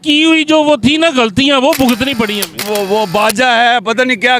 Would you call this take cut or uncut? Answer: cut